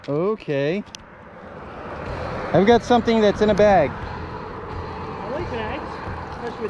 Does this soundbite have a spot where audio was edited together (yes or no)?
no